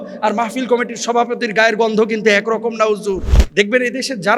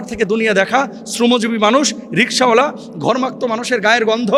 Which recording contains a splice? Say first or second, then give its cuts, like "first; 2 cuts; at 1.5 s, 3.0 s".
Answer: first; 1 cut; at 3.4 s